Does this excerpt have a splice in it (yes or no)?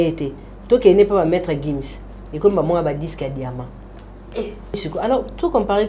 yes